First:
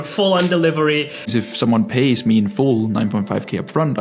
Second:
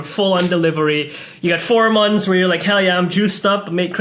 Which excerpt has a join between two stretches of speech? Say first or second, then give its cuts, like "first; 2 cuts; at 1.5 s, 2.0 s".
first; 1 cut; at 1.3 s